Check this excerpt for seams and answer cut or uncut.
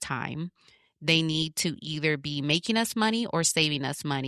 uncut